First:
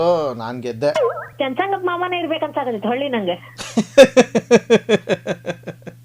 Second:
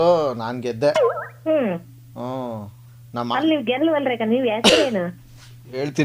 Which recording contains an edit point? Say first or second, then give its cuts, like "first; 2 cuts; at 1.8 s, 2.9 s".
first; 1 cut; at 1.2 s